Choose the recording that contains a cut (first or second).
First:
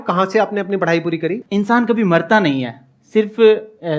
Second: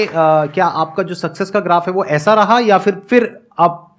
first